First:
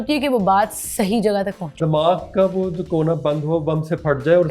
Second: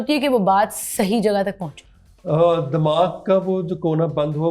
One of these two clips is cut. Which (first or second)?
first